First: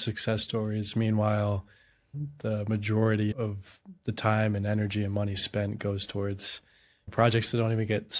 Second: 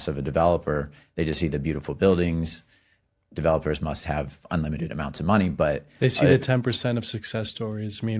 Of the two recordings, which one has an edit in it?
first; 3 cuts; at 2.1 s, 3.3 s, 7.1 s

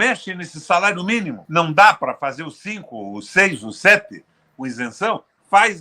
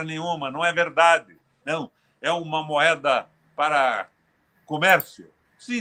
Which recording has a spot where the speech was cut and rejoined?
first; 1 cut; at 1.4 s

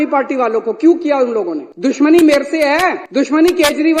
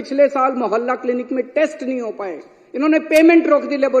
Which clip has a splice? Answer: first; 2 cuts; at 1.6 s, 3.0 s

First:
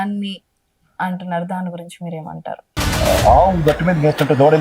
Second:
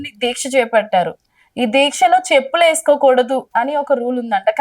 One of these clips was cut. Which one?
second; 1 cut; at 3.5 s

